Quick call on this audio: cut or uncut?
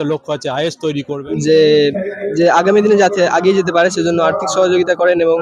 cut